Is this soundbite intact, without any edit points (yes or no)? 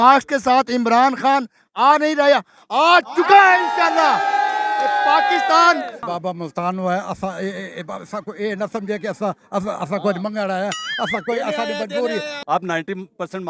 no